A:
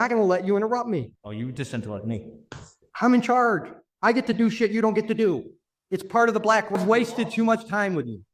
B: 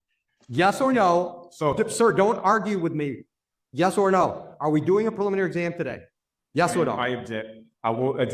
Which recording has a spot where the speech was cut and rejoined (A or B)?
A